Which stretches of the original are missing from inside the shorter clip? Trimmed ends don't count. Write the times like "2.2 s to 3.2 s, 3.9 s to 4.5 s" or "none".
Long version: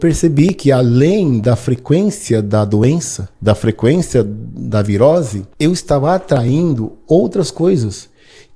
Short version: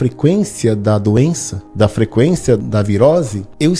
4.3 s to 4.7 s